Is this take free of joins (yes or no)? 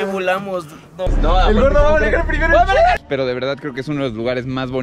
no